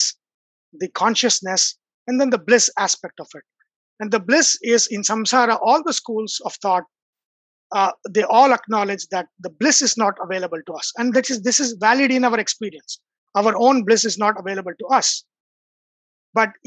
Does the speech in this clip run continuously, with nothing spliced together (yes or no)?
yes